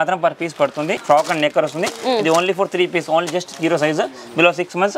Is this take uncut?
no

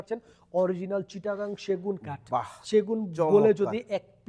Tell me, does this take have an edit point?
no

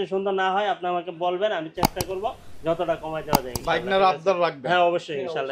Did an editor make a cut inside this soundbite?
no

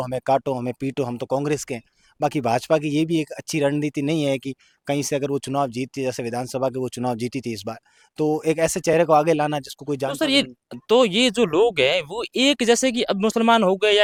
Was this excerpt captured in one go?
yes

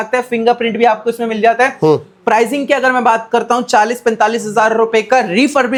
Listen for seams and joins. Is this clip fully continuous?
yes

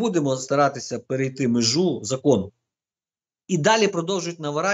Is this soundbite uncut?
yes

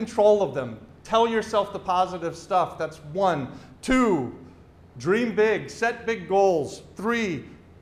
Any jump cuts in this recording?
no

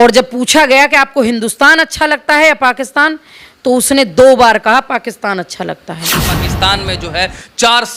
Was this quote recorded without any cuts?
no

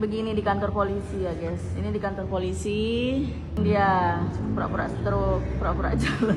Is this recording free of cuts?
no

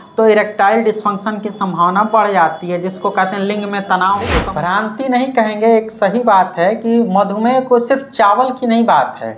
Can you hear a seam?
yes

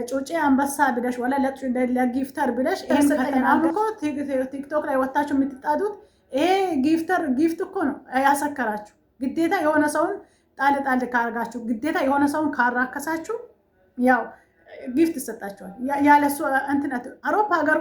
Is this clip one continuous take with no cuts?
no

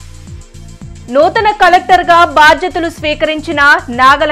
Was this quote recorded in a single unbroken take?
no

